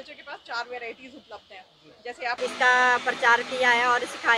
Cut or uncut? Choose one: cut